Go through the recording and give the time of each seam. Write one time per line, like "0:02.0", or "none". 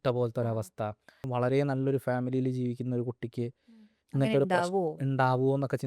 0:01.2